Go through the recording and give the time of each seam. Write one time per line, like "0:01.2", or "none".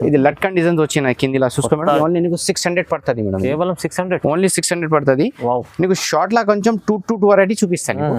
none